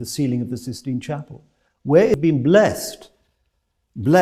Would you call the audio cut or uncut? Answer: cut